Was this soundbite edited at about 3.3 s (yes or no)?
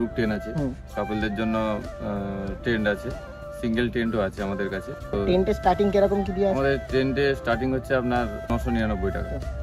no